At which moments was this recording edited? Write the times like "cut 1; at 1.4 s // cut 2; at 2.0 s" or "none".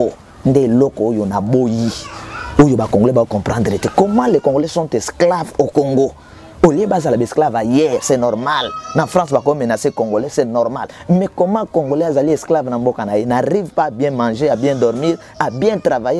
none

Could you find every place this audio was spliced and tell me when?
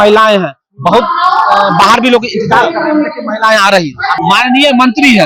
cut 1; at 4.2 s

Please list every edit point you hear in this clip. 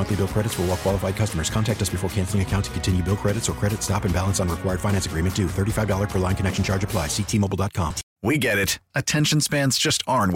cut 1; at 8.0 s

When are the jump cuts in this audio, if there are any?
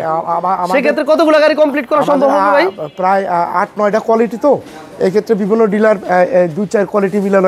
none

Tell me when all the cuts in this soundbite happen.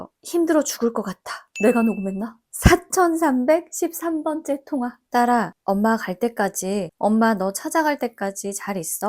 cut 1; at 5.0 s

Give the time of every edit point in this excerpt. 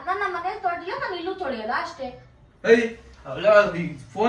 none

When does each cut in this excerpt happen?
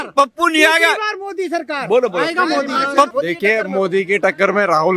cut 1; at 3.1 s

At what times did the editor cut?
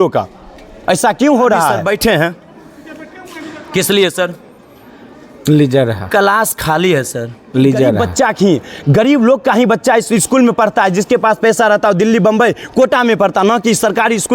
cut 1; at 1.8 s // cut 2; at 8.0 s

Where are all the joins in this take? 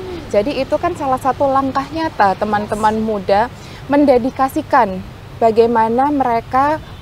none

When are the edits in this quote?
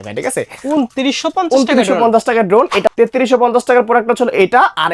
cut 1; at 2.9 s

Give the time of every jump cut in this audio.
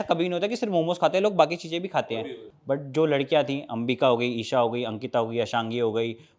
cut 1; at 2.3 s

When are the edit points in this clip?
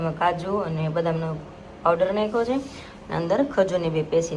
none

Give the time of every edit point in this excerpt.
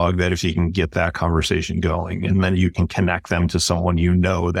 none

